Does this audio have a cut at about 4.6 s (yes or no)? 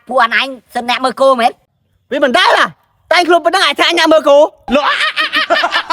yes